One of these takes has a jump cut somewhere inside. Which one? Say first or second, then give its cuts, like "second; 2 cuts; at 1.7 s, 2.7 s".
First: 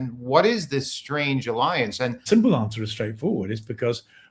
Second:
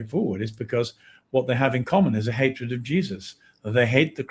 first; 1 cut; at 2.2 s